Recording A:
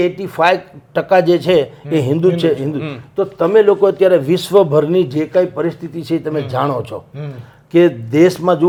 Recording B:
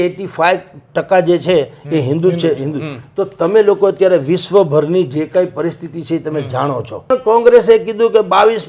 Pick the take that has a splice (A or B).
B